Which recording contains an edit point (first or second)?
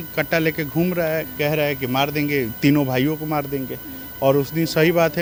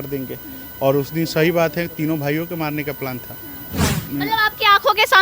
second